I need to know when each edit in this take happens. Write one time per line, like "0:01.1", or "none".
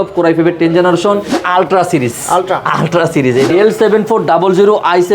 0:01.4
0:03.5